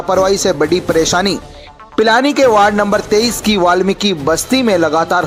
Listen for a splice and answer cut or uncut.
uncut